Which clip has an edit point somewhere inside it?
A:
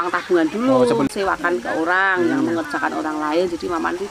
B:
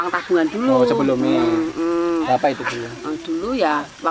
A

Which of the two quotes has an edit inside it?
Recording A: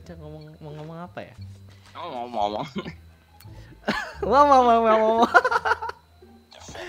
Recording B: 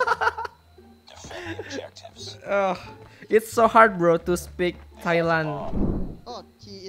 B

